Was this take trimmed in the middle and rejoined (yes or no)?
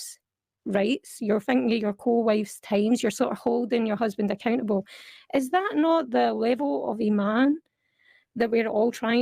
no